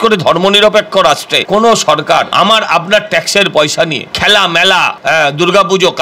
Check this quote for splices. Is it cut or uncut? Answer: cut